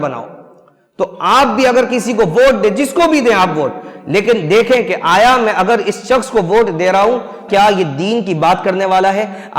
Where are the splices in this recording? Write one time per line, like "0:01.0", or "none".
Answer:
0:07.4

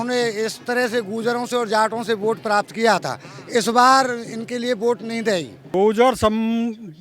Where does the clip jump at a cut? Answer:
0:05.6

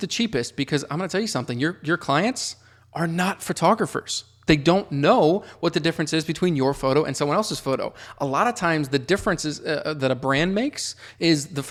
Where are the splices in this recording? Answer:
none

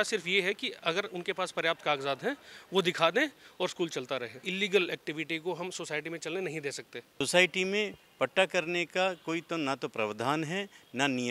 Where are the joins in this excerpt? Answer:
0:04.5
0:07.2

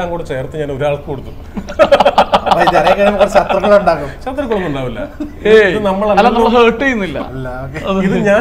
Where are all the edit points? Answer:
none

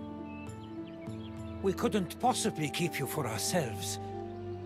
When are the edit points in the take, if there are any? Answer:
0:01.3

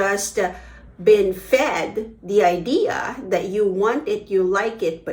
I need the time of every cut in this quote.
none

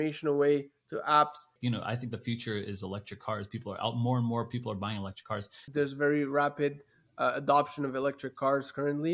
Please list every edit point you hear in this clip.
0:01.5
0:05.6

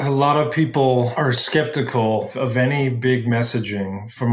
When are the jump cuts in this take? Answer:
0:01.1
0:02.3

